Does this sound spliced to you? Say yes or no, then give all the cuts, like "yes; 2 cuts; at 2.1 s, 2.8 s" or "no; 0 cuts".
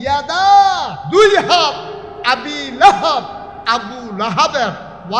yes; 1 cut; at 0.9 s